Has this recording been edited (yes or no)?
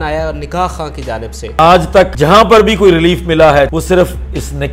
yes